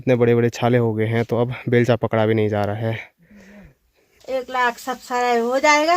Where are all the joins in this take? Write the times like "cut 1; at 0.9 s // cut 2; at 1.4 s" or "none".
cut 1; at 4.1 s